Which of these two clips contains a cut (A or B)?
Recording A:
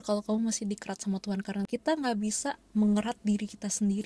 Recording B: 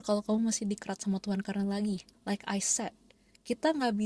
A